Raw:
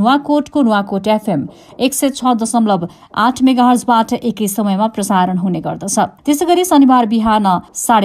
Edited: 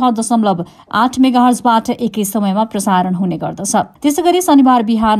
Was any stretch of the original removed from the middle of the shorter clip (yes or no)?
no